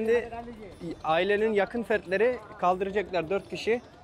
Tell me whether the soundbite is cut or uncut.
uncut